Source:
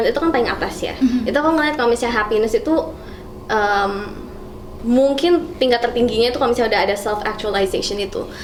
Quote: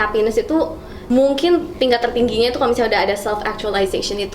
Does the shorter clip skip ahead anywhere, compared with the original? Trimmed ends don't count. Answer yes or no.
yes